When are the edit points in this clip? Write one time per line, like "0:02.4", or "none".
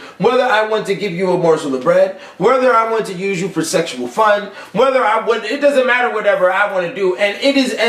0:03.0